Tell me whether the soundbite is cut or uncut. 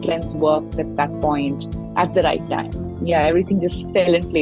uncut